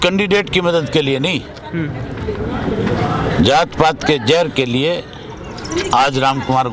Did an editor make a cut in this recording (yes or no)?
no